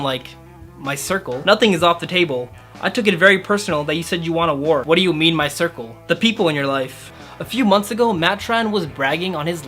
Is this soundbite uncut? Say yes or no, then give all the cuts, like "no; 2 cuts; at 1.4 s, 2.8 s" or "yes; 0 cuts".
no; 2 cuts; at 4.8 s, 7.1 s